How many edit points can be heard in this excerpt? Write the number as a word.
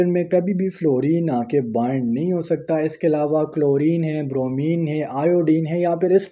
zero